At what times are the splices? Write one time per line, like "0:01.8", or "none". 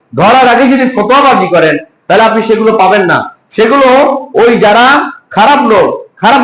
none